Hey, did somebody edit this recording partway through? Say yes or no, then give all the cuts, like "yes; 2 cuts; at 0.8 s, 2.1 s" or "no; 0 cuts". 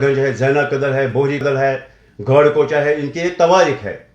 yes; 1 cut; at 1.4 s